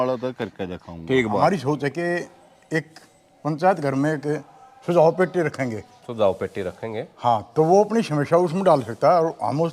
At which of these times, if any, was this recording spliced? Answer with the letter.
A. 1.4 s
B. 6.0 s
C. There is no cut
A